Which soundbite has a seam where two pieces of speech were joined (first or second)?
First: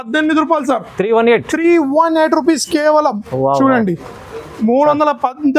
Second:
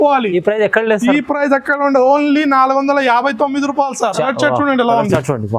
second